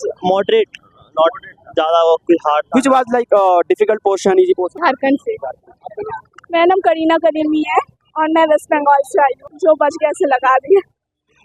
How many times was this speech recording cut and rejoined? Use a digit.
2